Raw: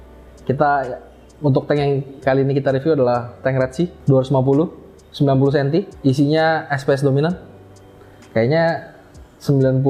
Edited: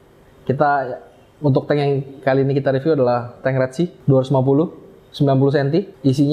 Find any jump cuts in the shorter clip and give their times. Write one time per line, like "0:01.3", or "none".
none